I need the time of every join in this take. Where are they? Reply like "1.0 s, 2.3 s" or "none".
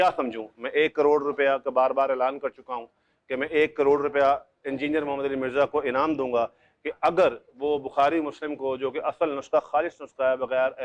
none